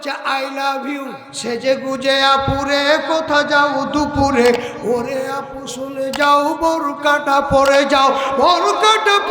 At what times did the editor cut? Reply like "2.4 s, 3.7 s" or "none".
1.2 s